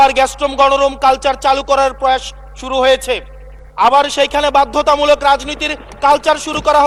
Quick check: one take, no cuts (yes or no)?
yes